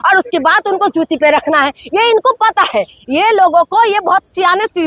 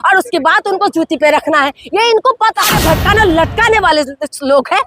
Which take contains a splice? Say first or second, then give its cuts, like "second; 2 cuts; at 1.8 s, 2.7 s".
second; 1 cut; at 2.6 s